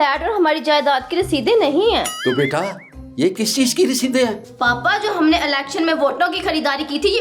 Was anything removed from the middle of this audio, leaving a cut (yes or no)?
yes